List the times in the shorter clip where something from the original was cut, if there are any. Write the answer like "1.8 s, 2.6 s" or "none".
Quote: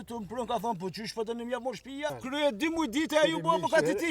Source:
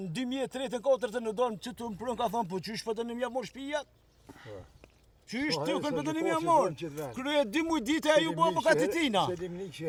2.2 s

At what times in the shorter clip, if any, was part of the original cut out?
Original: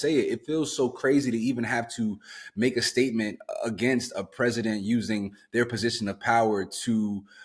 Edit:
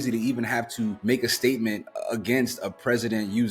1.0 s

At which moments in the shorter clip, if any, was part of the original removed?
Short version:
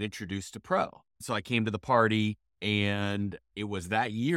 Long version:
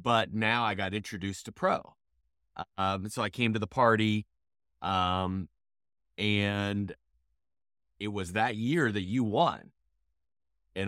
1.2 s, 2.5 s, 3.4 s

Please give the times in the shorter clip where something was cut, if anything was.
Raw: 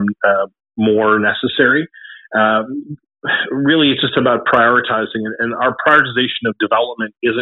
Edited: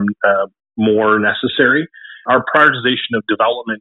2.2 s

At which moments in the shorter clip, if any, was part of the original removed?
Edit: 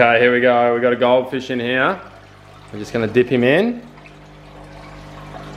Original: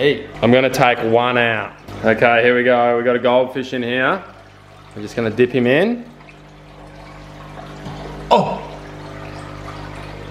none

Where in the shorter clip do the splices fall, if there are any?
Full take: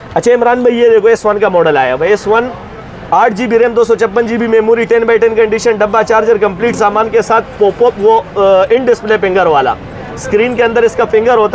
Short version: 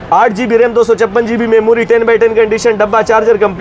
none

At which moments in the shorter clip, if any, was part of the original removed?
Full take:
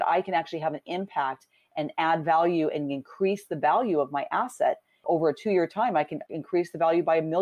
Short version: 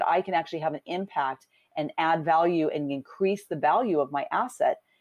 none

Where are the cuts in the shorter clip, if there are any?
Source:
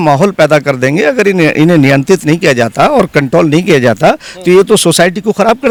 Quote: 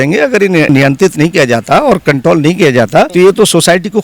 0.7 s, 3.1 s

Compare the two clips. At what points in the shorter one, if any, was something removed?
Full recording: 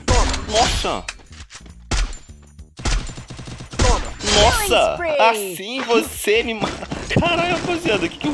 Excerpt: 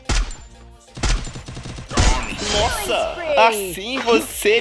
none

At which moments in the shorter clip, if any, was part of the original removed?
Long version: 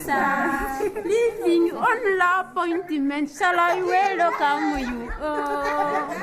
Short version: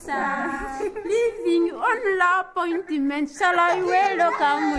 none

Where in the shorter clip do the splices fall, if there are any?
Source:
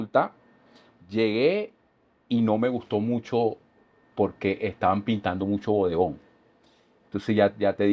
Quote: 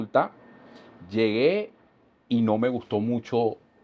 none

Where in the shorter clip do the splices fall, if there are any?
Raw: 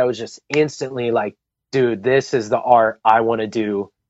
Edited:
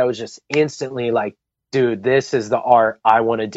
none

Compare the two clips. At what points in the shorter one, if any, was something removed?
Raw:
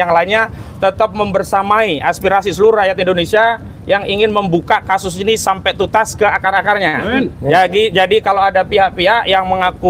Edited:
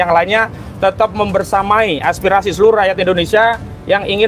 none

